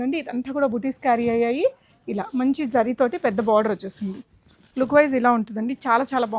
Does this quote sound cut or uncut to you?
uncut